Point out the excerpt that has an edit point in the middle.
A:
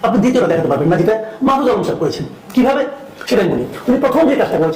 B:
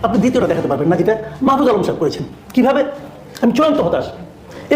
B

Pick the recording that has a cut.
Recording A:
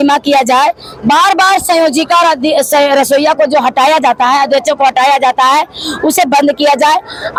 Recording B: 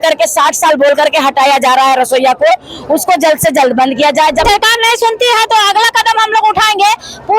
B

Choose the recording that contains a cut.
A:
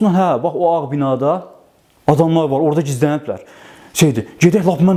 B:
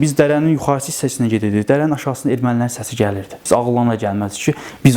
B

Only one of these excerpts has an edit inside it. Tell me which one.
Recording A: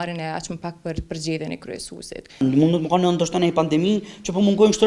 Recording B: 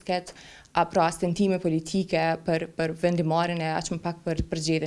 A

